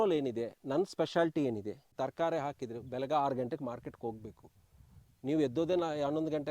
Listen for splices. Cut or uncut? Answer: cut